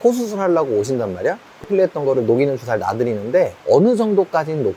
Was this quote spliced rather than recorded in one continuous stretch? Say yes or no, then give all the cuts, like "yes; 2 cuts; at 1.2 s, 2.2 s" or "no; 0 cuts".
yes; 1 cut; at 1.6 s